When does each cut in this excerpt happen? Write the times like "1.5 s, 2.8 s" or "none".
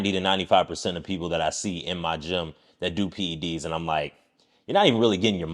none